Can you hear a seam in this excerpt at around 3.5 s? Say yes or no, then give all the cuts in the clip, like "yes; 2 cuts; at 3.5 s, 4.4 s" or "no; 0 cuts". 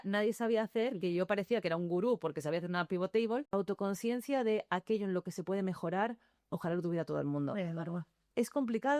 yes; 1 cut; at 3.5 s